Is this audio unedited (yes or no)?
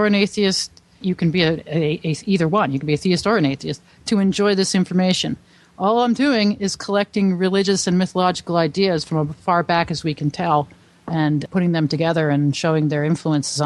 no